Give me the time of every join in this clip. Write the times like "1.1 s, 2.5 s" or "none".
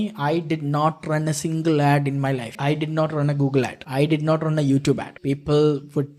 2.5 s, 3.8 s, 5.1 s